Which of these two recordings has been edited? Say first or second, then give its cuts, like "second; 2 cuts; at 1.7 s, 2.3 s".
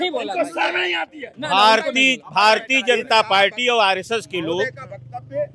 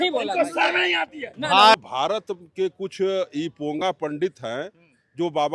second; 1 cut; at 1.8 s